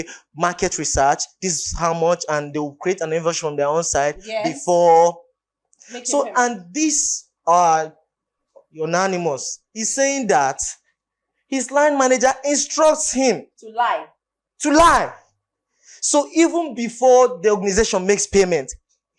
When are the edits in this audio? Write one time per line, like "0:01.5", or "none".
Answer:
none